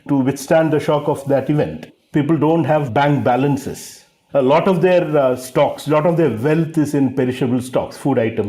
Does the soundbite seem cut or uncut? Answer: cut